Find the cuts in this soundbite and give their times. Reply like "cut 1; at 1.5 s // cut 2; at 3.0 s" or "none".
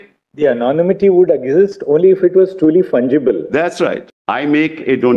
cut 1; at 4.0 s